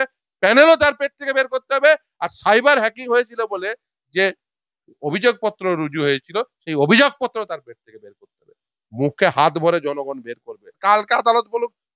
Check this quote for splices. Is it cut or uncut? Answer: cut